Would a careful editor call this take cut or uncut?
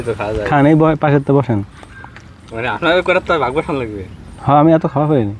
uncut